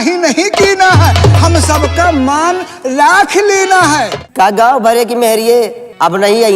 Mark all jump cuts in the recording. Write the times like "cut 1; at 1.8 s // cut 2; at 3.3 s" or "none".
cut 1; at 4.2 s